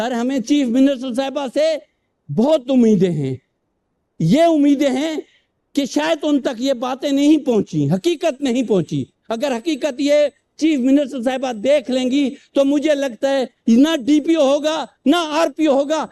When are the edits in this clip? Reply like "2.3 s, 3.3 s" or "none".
none